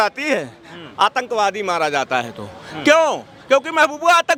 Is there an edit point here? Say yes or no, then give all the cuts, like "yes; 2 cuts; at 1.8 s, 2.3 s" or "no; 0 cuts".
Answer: no; 0 cuts